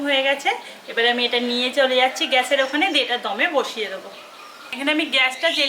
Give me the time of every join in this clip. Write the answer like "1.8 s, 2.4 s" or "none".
none